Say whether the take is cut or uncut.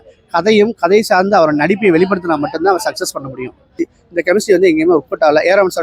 cut